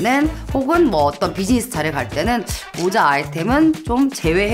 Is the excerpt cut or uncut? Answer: uncut